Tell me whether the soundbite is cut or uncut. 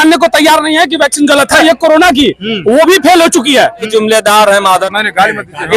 cut